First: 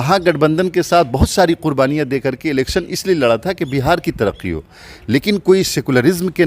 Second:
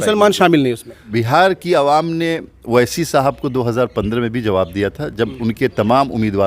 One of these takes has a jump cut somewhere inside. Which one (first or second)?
second